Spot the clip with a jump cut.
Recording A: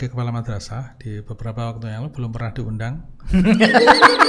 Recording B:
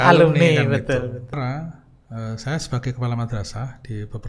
B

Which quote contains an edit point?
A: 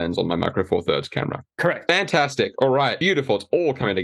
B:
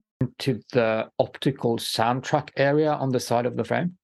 A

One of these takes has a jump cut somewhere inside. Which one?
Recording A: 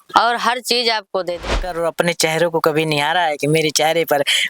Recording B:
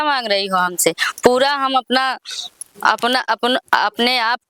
A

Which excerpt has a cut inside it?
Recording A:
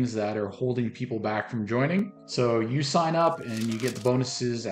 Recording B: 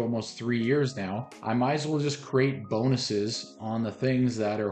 A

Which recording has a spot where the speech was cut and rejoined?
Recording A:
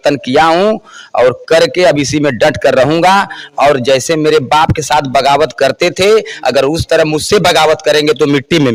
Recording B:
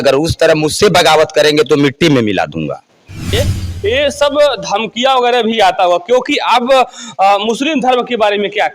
B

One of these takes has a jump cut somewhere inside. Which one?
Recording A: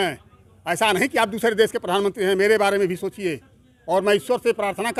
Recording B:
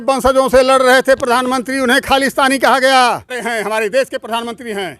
B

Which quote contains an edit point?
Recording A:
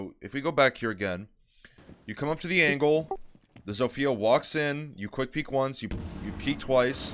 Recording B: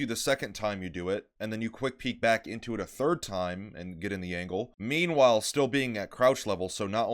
B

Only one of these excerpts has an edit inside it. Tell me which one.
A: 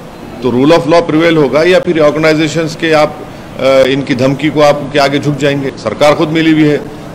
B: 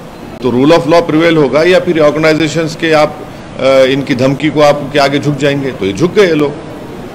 A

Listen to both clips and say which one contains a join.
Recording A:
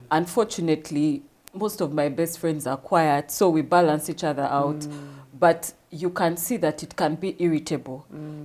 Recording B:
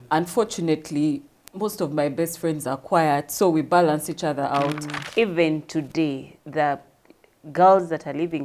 B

